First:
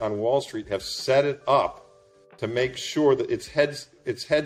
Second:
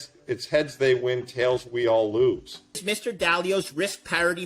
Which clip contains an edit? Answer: second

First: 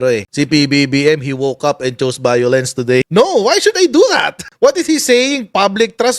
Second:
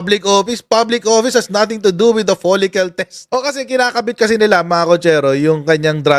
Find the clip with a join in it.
first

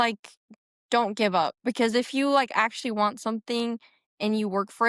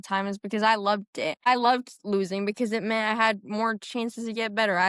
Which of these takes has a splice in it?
second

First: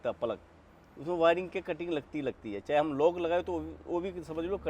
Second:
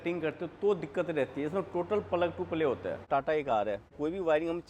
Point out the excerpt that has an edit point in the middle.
second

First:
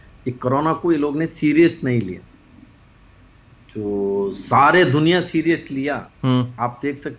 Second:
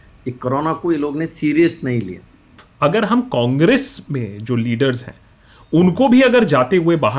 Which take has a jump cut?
second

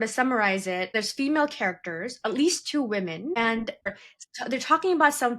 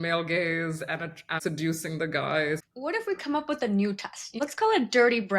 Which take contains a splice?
first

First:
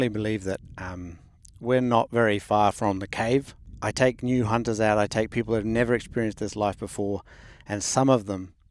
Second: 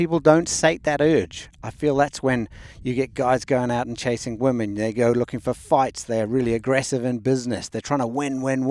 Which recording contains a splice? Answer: first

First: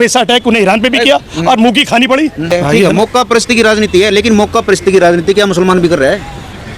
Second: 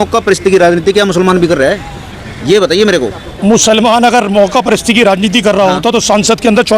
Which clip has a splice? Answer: first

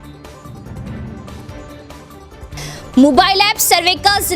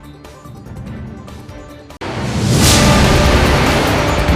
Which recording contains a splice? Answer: first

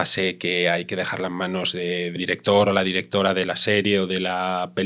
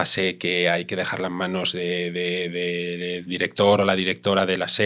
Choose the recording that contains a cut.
first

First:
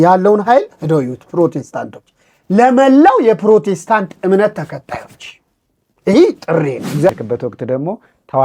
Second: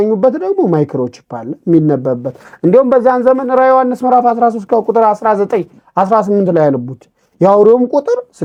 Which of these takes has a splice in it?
first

